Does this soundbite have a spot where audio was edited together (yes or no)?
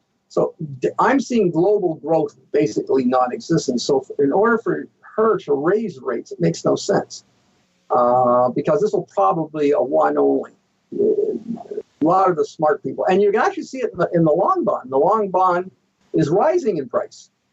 yes